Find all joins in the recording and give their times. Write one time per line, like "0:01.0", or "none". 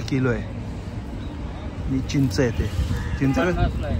none